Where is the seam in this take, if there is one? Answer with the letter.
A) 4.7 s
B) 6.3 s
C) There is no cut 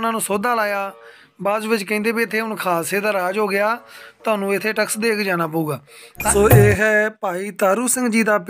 B